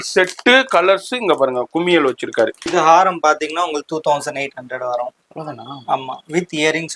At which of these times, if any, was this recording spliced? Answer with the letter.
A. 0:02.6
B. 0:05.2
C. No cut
A